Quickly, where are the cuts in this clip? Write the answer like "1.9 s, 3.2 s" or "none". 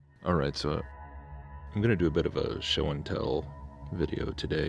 none